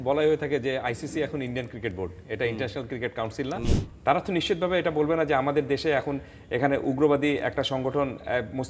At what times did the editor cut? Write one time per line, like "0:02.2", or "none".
0:03.7